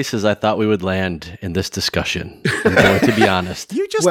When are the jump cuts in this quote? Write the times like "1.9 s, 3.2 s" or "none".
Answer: none